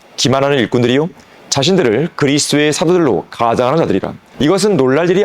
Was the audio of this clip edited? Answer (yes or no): yes